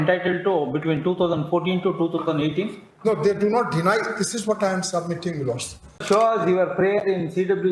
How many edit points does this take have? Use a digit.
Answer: 1